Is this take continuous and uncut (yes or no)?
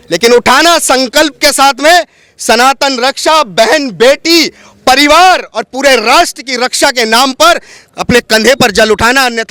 yes